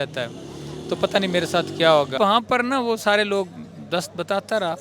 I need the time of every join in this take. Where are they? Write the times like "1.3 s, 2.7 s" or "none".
2.2 s

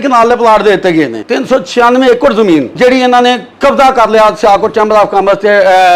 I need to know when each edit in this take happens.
1.2 s, 2.7 s

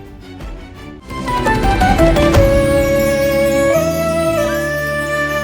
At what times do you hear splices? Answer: 0.9 s

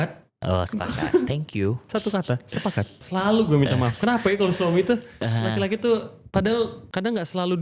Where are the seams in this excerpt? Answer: 3.0 s

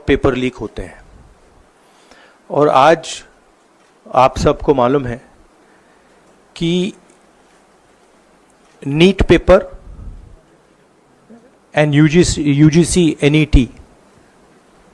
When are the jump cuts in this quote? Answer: none

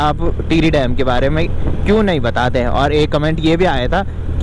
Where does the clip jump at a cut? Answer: none

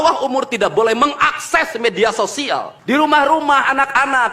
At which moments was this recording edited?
2.7 s

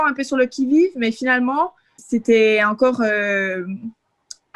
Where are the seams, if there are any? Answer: 2.0 s

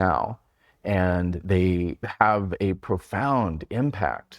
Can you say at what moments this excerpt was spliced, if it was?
2.0 s

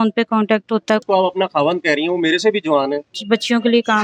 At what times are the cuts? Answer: 1.0 s, 3.2 s

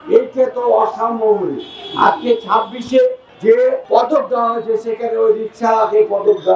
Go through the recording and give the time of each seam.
3.6 s

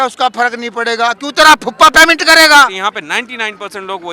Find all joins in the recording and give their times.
2.8 s

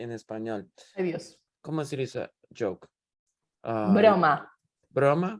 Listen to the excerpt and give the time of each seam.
1.5 s

